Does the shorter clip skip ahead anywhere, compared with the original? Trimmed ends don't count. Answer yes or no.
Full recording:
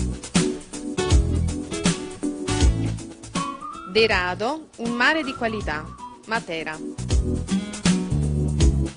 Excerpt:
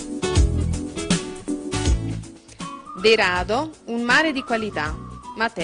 yes